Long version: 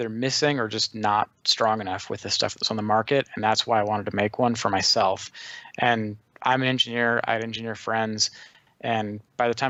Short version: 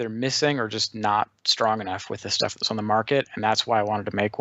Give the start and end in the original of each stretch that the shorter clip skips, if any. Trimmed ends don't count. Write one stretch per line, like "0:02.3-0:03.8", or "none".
none